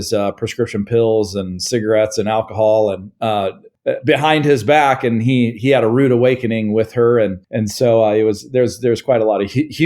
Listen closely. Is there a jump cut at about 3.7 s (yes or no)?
yes